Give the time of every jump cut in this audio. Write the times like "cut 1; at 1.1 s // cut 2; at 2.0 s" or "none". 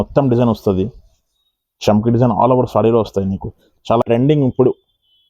cut 1; at 4.0 s